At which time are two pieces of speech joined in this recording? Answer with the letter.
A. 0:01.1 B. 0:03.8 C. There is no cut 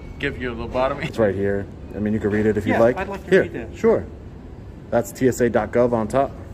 A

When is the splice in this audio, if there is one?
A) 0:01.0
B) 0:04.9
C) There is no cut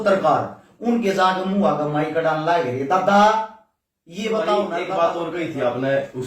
B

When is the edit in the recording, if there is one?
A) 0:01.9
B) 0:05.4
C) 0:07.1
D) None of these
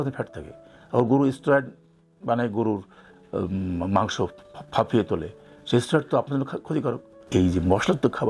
C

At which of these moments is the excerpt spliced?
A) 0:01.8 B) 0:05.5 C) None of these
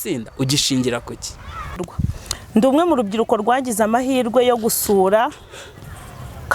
A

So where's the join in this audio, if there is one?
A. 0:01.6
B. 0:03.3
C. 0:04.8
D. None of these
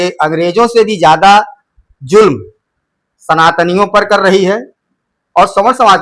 D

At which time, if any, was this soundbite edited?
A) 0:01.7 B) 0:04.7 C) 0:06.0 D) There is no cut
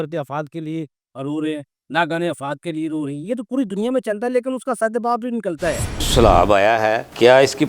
C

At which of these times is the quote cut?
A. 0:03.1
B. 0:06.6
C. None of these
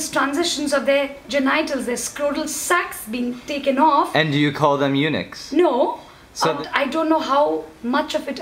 B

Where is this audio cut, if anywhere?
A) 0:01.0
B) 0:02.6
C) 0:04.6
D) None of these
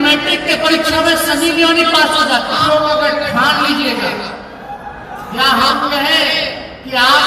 B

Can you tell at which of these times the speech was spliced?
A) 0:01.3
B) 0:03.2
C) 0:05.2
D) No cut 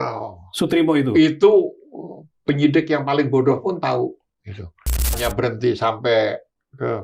C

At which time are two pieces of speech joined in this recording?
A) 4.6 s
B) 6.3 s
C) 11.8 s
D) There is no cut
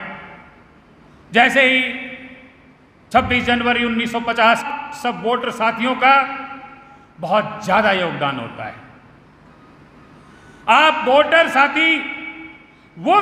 A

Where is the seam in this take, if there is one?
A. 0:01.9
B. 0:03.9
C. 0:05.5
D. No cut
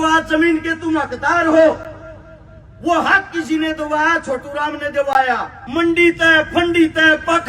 C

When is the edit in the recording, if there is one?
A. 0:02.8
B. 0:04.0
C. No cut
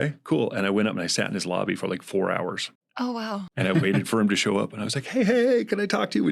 C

